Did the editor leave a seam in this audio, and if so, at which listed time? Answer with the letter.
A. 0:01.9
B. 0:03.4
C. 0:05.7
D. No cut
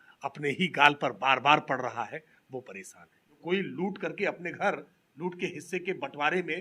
B